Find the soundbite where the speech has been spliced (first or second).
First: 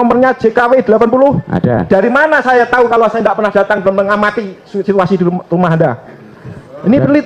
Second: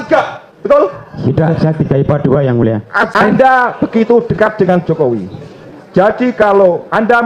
second